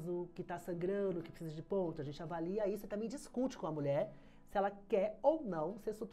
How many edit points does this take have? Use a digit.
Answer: 0